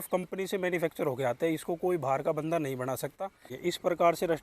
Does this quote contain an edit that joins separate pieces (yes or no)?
yes